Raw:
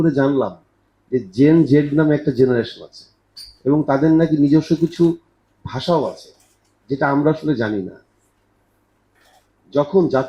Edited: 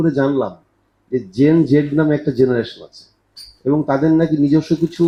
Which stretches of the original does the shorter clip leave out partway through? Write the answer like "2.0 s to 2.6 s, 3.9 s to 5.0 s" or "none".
none